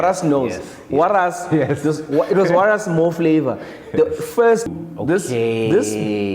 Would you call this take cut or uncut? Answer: cut